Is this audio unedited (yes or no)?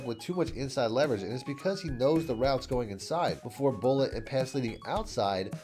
no